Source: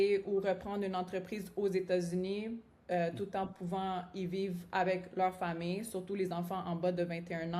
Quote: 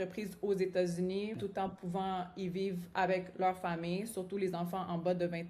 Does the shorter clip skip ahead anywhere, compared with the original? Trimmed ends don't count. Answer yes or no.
yes